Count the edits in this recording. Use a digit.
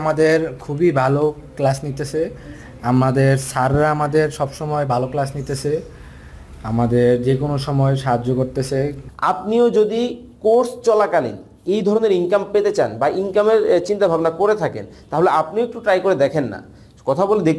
1